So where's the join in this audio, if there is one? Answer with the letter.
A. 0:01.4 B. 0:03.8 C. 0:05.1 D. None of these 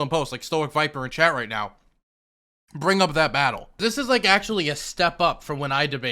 B